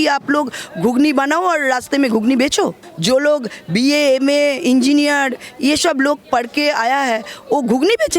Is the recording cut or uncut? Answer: cut